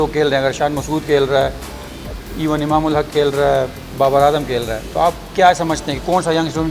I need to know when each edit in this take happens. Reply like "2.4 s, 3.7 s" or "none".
none

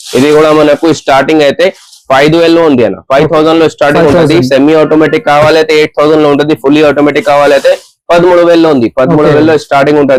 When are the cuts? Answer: none

